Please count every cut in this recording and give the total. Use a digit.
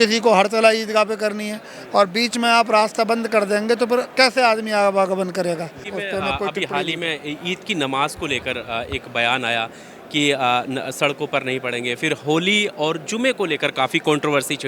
1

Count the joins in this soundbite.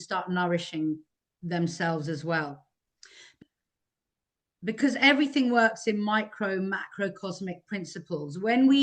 1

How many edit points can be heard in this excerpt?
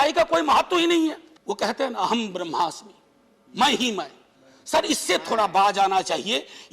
1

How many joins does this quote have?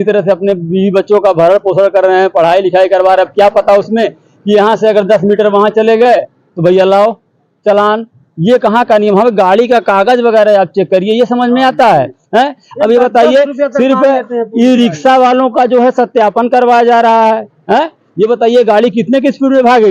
0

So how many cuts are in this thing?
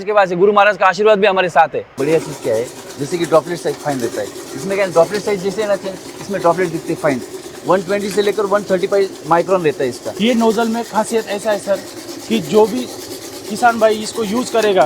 2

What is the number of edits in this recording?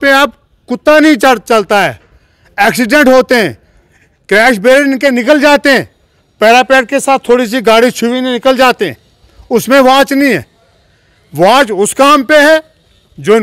0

